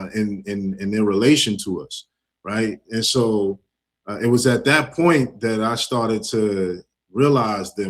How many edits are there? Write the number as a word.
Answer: zero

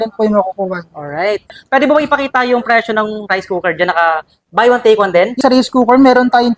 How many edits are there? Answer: two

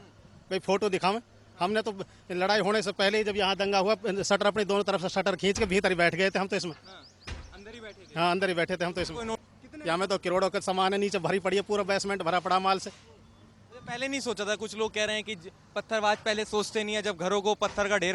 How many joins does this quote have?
one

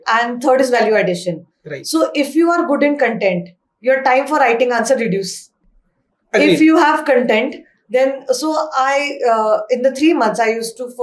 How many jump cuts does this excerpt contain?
zero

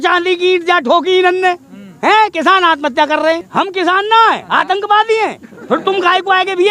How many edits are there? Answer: one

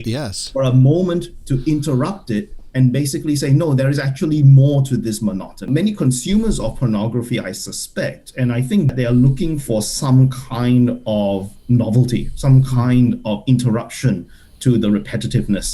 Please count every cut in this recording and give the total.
two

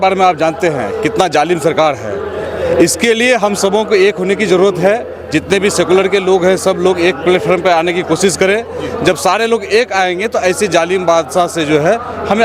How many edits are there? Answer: zero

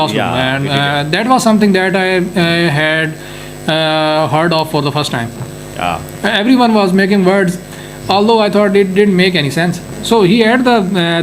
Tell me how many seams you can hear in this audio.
one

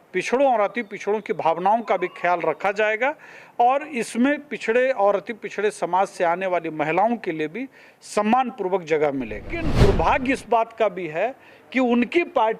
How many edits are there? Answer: one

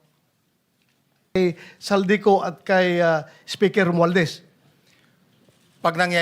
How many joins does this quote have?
one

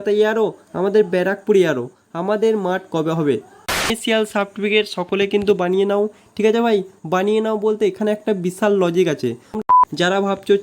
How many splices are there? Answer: two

